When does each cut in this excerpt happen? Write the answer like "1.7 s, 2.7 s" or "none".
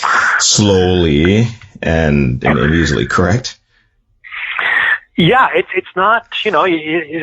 none

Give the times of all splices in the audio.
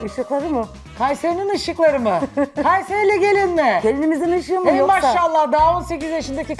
none

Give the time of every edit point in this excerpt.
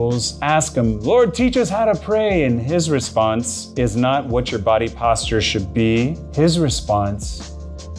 3.6 s, 6.2 s

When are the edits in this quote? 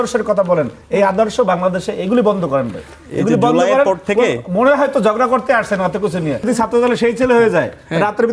6.4 s

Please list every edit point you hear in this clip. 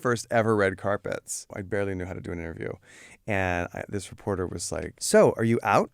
1.6 s, 5.0 s

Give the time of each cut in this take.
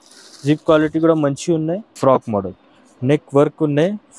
1.9 s

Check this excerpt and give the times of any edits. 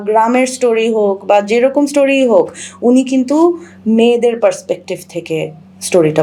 none

